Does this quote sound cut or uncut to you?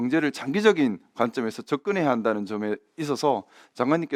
uncut